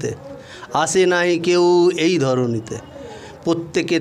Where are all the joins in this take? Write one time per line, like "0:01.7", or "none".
none